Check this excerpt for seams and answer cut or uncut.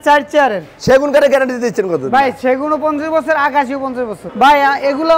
cut